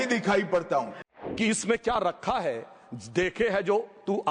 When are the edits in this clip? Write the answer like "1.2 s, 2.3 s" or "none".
1.1 s